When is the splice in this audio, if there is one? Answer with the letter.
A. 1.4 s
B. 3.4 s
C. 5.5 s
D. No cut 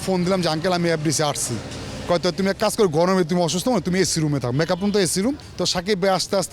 C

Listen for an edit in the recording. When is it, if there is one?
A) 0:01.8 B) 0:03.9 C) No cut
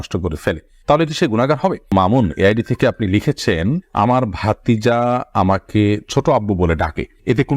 A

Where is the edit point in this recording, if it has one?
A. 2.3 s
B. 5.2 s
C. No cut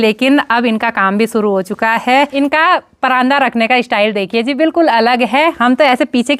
A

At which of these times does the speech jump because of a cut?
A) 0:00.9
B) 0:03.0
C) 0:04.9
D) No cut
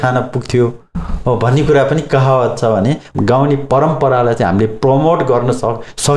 B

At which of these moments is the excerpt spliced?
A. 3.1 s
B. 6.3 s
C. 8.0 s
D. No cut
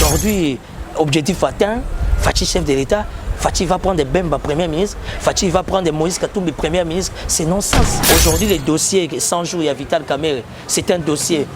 C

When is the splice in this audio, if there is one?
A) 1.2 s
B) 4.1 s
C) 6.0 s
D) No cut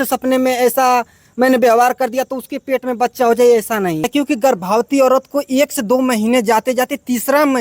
B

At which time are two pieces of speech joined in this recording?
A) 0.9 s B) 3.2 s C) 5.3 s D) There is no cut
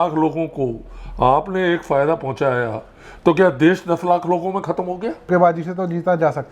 C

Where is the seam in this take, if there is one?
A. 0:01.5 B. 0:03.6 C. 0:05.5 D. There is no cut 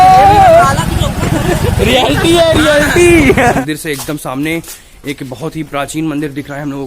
B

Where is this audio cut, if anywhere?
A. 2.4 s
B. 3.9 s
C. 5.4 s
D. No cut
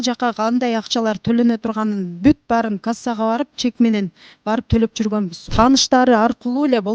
C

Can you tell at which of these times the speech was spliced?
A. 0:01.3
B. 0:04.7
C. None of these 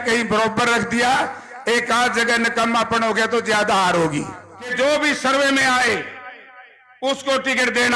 B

